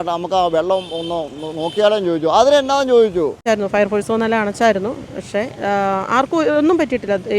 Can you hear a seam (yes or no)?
yes